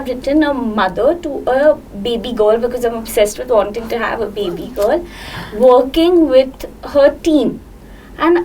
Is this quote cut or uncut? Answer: uncut